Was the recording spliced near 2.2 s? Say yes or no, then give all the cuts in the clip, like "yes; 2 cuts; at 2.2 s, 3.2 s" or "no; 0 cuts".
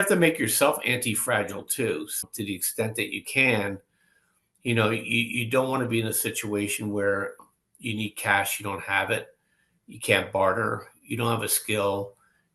yes; 2 cuts; at 2.2 s, 7.5 s